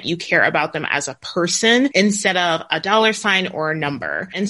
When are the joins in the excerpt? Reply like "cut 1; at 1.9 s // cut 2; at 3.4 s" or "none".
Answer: cut 1; at 1.9 s